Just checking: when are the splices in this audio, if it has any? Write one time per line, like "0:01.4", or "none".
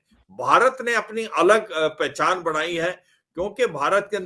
none